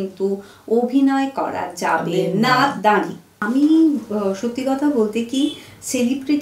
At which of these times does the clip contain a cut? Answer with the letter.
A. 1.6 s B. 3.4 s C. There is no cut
B